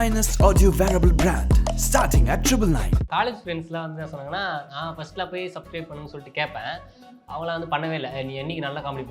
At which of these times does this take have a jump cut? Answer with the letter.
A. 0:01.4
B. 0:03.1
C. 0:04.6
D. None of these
B